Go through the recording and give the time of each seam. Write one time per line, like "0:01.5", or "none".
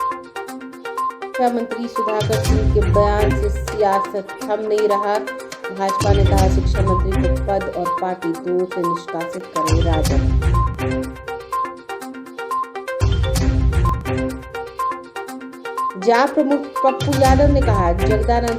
0:01.0